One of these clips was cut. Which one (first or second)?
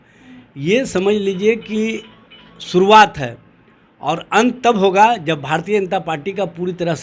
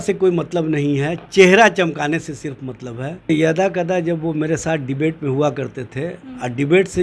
second